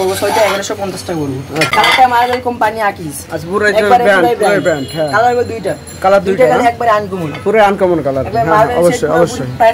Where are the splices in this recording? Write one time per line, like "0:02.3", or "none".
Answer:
0:01.7